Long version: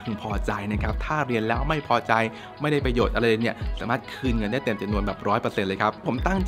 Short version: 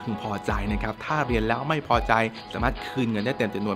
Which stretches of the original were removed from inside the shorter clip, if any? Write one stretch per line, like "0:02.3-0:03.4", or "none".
0:02.4-0:03.7